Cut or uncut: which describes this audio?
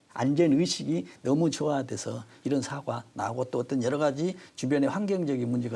uncut